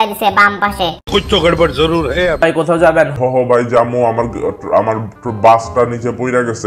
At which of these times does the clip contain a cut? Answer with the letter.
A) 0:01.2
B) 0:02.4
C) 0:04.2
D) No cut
B